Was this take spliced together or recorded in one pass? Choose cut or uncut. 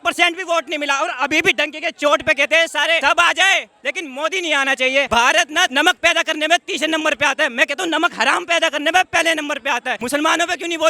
cut